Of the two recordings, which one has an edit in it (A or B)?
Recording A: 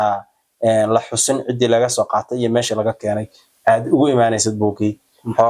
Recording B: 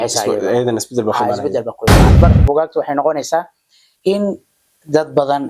B